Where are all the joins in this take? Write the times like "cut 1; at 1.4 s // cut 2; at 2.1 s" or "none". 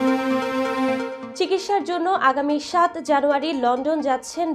cut 1; at 1.2 s